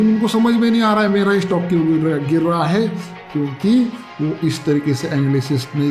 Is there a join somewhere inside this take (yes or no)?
no